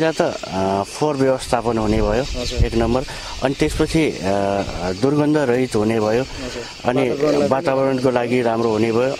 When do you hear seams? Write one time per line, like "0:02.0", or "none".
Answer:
none